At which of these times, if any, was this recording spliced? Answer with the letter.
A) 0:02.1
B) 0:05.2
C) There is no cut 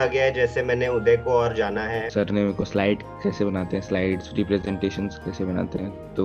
A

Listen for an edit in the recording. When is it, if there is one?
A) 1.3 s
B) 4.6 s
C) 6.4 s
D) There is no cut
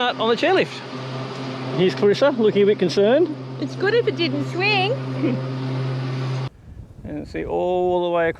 C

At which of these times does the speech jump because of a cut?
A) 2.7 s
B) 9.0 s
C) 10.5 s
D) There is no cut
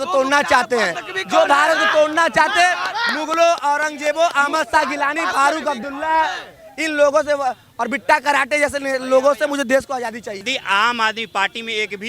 C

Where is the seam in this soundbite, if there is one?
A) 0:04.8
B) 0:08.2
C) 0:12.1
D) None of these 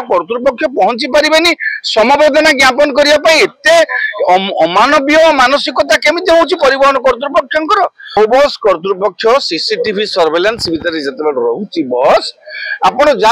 B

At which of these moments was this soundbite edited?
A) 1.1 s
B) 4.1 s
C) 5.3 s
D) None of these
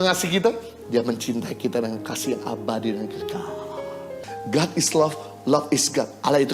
B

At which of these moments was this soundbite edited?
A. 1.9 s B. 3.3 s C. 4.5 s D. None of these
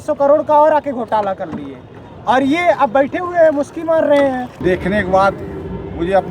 C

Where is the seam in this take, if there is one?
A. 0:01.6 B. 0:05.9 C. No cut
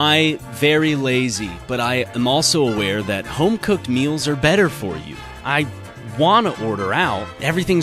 C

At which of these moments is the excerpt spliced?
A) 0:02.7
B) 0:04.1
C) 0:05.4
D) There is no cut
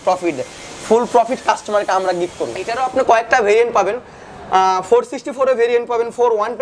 A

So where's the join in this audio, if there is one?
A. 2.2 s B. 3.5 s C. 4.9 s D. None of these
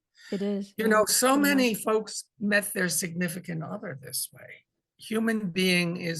C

